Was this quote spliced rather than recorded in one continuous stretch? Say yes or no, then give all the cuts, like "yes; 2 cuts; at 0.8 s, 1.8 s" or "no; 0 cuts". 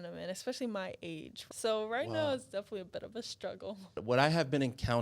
yes; 2 cuts; at 1.4 s, 4.0 s